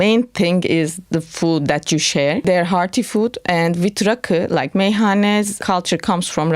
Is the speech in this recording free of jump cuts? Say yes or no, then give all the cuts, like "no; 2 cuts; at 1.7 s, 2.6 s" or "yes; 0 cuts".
no; 2 cuts; at 2.4 s, 5.6 s